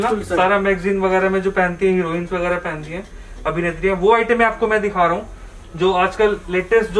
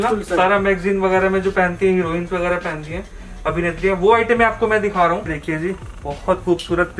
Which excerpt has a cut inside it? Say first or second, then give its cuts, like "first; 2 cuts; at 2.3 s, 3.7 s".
second; 1 cut; at 5.4 s